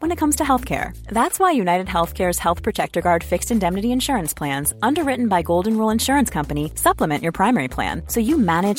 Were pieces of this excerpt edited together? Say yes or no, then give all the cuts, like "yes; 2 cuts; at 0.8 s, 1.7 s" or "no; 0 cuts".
no; 0 cuts